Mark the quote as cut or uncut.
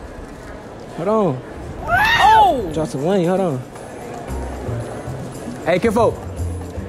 uncut